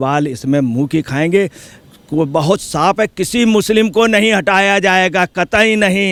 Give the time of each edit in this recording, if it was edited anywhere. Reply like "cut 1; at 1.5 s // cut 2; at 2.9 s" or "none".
none

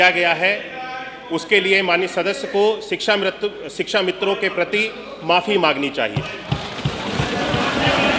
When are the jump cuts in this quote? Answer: none

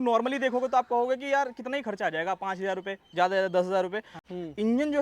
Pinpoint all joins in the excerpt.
cut 1; at 4.1 s

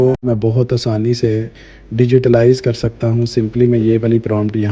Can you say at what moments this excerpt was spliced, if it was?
none

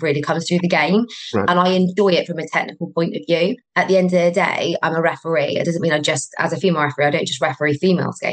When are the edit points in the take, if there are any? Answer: cut 1; at 3.6 s

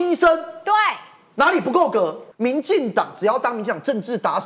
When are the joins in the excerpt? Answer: cut 1; at 2.2 s

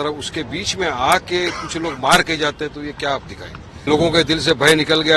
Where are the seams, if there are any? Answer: cut 1; at 3.9 s

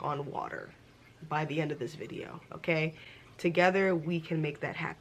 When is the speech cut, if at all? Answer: none

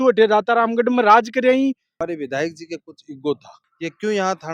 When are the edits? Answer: cut 1; at 1.9 s // cut 2; at 3.5 s

